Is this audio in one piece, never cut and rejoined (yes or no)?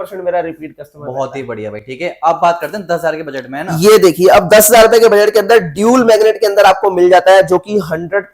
yes